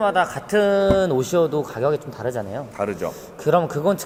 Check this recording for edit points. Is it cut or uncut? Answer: uncut